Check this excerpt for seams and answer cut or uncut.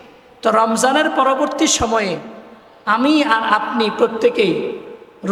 uncut